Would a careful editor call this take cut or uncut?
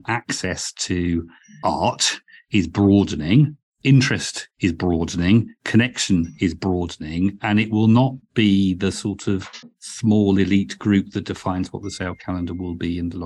uncut